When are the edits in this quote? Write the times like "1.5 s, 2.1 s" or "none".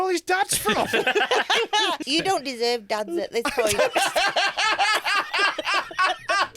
2.0 s